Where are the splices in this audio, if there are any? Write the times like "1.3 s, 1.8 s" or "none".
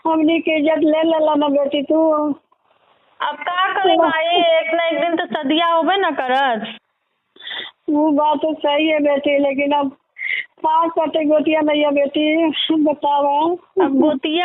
none